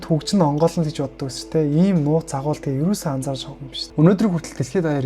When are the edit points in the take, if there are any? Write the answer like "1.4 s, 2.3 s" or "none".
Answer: 3.8 s